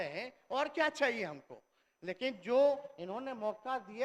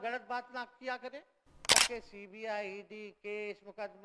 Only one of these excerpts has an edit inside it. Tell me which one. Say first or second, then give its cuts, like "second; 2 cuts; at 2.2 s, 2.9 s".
second; 1 cut; at 1.8 s